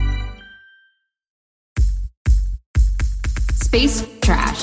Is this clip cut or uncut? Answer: cut